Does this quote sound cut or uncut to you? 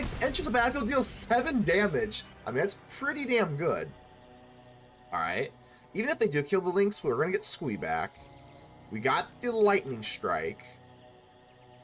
uncut